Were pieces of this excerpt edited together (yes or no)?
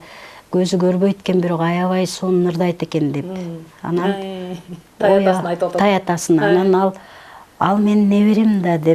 no